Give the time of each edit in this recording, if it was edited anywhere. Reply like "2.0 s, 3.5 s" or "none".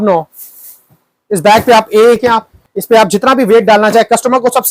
2.2 s

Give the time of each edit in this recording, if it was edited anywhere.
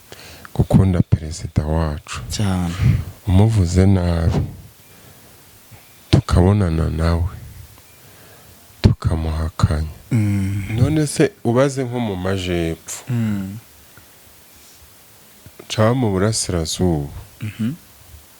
10.7 s

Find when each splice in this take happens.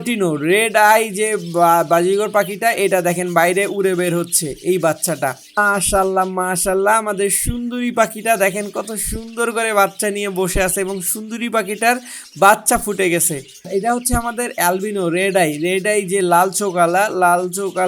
5.6 s, 13.7 s

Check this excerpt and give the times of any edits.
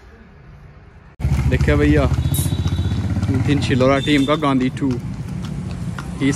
1.1 s

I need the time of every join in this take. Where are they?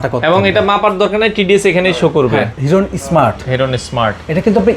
2.5 s

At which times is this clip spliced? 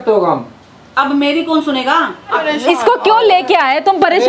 2.4 s

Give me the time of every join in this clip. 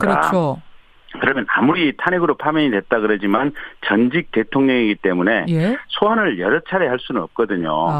3.2 s

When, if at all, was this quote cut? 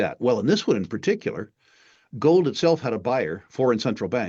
none

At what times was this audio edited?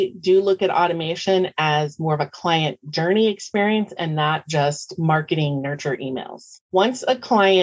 6.4 s

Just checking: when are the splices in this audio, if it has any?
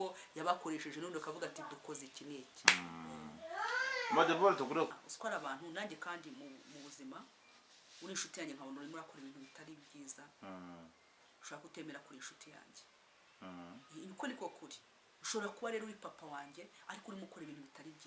5.0 s

